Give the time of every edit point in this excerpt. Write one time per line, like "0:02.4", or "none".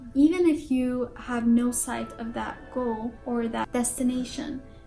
0:03.5